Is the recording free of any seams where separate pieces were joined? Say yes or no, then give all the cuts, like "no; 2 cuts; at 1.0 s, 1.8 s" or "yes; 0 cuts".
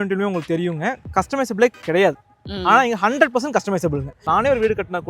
no; 1 cut; at 4.2 s